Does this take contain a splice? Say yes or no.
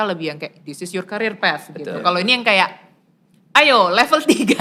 no